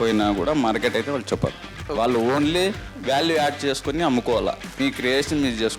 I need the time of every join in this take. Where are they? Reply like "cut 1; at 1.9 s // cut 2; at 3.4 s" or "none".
cut 1; at 1.7 s // cut 2; at 4.7 s